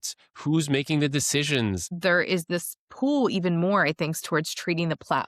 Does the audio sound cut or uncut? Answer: cut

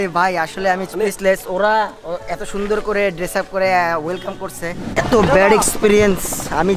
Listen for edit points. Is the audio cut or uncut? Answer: cut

